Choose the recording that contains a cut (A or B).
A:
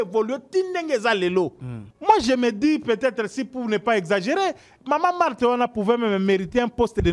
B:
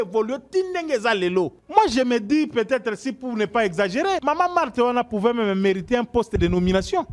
B